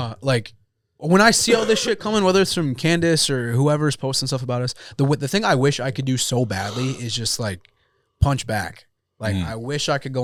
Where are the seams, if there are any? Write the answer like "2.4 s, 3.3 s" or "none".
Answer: none